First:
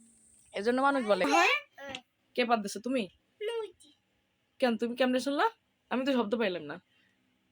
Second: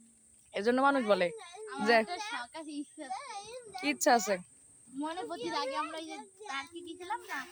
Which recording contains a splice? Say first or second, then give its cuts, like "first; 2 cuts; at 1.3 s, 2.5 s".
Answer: first; 1 cut; at 1.2 s